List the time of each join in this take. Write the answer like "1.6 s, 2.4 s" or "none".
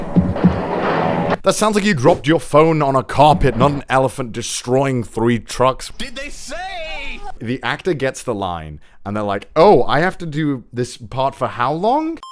1.4 s, 5.8 s, 7.4 s